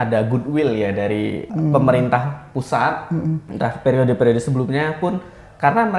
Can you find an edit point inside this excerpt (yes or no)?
yes